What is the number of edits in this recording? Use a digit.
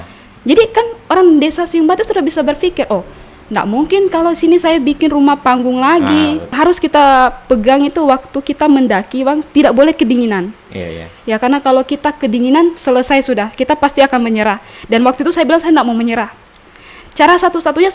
1